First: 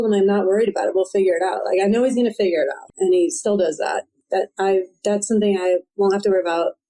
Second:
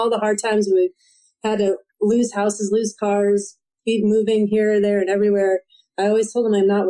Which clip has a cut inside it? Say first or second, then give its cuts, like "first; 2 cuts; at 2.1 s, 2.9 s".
first; 2 cuts; at 2.8 s, 4.2 s